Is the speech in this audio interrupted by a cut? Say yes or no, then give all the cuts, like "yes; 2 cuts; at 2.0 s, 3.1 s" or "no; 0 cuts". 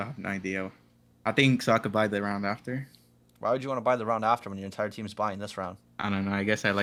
no; 0 cuts